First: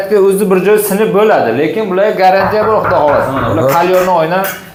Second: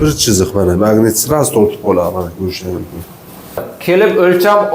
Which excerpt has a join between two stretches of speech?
second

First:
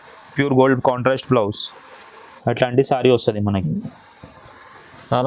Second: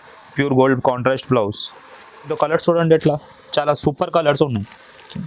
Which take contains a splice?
second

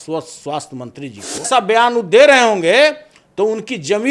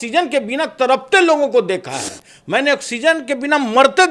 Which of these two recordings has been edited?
first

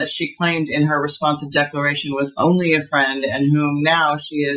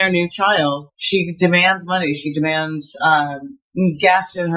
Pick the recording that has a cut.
second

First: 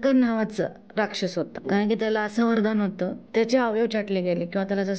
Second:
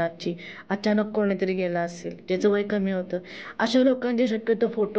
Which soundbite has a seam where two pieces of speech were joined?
first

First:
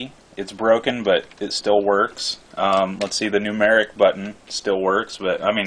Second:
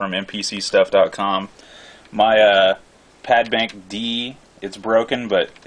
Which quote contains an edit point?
second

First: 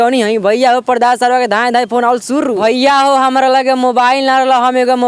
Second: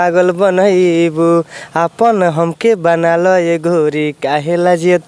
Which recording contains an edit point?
first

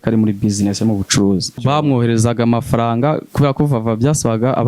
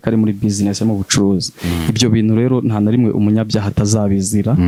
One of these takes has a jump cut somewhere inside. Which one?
first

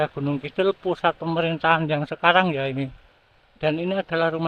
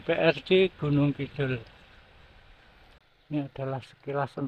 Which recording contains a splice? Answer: second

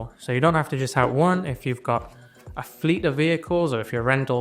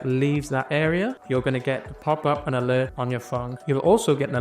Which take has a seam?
second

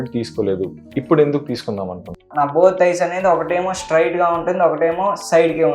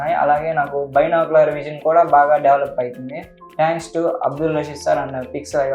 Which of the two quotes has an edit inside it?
first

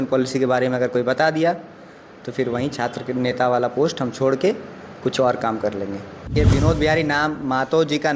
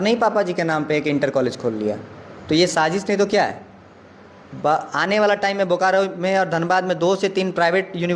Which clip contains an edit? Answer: first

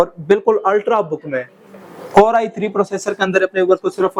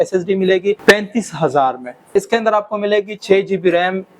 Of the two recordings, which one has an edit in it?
second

